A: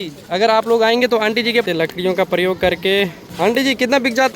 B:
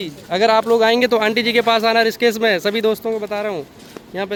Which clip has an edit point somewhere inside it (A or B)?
A